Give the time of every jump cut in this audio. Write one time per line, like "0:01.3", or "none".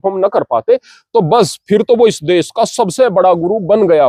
none

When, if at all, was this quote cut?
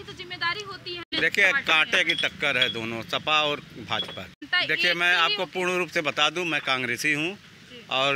0:01.1
0:04.4

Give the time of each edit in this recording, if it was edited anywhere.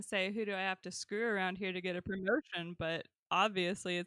none

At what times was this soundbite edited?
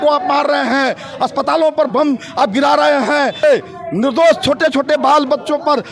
0:03.4

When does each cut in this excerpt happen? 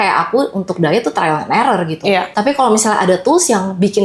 0:02.3

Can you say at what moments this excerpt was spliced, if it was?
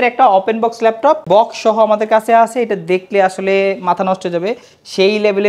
0:01.2

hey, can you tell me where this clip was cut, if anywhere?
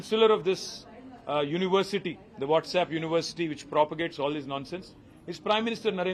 none

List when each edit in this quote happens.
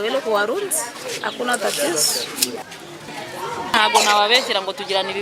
0:03.1

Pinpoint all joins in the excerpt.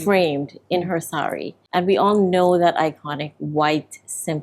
0:01.5

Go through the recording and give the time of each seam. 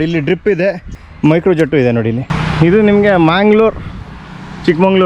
0:01.0
0:02.4

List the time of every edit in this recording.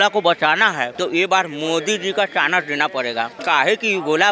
0:00.9
0:03.4

